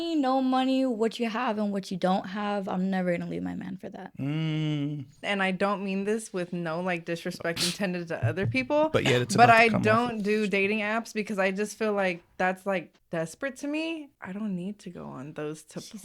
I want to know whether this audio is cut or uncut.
cut